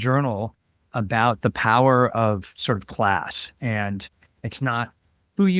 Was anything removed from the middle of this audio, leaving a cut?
no; 0 cuts

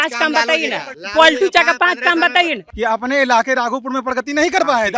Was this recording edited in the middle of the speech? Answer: yes; 2 cuts; at 1.0 s, 2.6 s

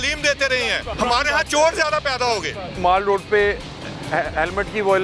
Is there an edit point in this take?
yes; 2 cuts; at 0.9 s, 2.8 s

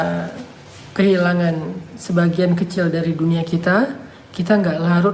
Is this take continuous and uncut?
yes; 0 cuts

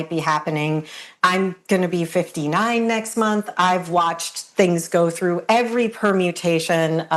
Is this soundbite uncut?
yes; 0 cuts

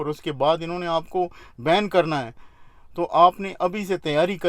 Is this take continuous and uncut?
yes; 0 cuts

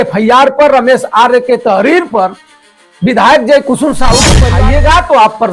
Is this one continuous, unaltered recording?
no; 1 cut; at 4.4 s

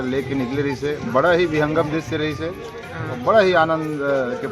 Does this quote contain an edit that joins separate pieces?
no; 0 cuts

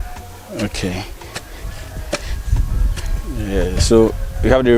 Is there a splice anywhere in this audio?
no; 0 cuts

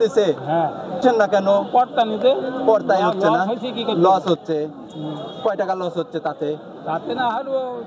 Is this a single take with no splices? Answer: no; 1 cut; at 1.0 s

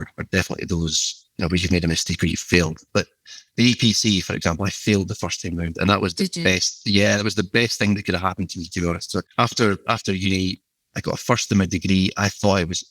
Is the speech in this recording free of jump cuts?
no; 1 cut; at 9.3 s

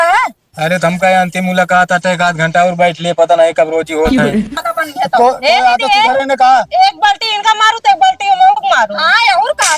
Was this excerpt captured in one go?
no; 1 cut; at 4.5 s

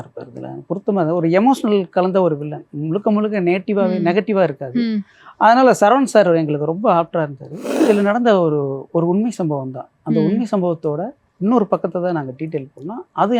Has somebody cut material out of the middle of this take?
yes; 1 cut; at 7.6 s

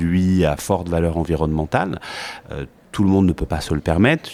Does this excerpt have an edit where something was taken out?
no; 0 cuts

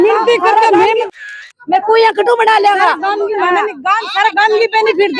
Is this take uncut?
no; 1 cut; at 1.2 s

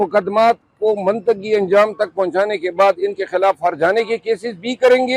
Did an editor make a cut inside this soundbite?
no; 0 cuts

